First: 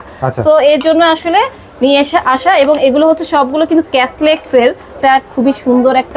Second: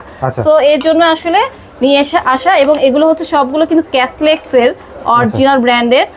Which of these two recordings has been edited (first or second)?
first